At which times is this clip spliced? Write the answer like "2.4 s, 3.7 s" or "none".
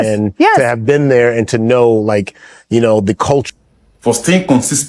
3.5 s